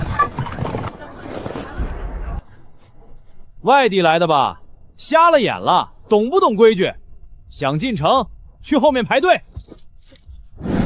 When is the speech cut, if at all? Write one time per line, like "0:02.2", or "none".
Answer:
0:00.9